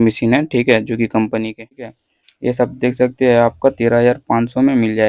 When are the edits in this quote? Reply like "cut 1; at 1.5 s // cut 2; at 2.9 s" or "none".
cut 1; at 1.9 s